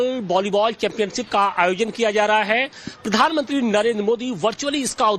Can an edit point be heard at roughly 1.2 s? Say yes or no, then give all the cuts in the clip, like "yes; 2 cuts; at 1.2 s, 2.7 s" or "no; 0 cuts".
yes; 1 cut; at 1.2 s